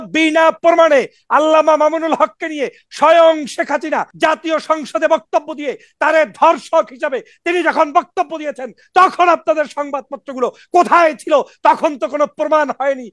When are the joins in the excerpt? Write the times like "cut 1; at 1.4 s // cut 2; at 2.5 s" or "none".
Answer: cut 1; at 4.1 s